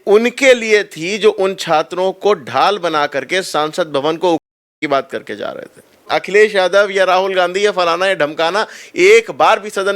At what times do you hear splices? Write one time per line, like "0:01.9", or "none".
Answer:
0:06.1